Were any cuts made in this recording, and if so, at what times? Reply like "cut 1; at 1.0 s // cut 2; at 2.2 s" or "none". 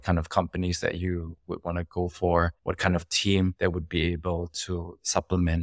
cut 1; at 2.6 s